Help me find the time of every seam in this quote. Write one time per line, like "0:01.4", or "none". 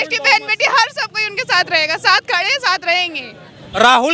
none